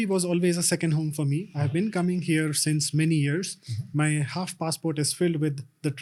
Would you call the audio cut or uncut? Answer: uncut